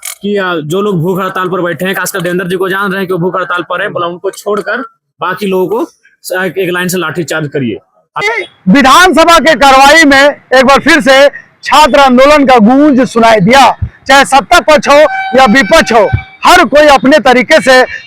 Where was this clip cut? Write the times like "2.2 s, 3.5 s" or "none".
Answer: 8.2 s